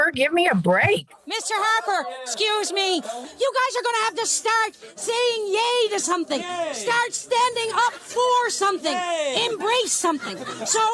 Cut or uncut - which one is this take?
cut